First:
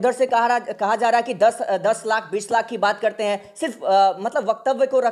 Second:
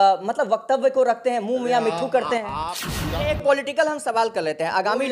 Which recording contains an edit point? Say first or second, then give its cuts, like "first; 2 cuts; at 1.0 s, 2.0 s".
second; 1 cut; at 2.5 s